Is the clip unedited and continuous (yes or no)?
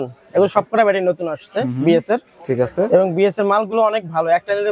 yes